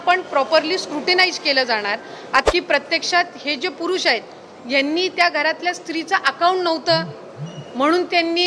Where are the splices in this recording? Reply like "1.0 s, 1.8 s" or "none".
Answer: 2.4 s